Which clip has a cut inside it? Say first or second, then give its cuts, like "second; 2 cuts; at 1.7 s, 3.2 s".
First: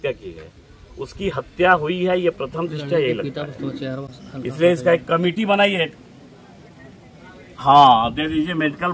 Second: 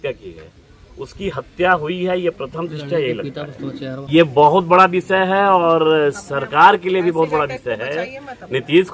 second; 1 cut; at 4.0 s